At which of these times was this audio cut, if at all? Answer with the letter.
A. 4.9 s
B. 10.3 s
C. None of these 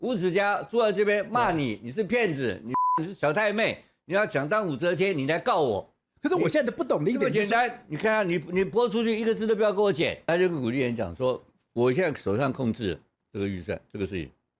B